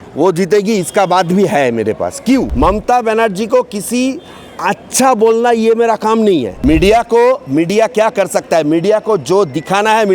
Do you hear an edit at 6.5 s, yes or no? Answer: yes